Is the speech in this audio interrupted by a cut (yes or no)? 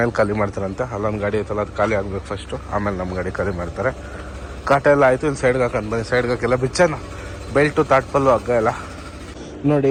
no